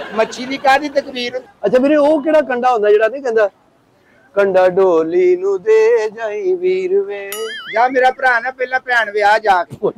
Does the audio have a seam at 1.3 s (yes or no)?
yes